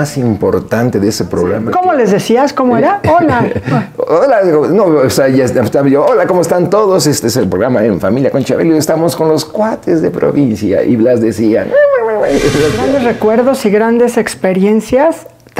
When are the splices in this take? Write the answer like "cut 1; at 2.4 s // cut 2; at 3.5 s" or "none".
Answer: cut 1; at 1.6 s // cut 2; at 12.8 s